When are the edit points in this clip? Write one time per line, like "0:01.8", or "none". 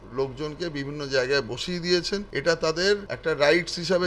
0:02.3
0:03.1

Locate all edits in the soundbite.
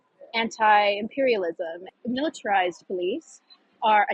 0:01.9

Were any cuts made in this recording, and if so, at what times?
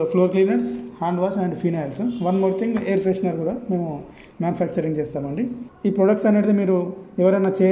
0:05.6

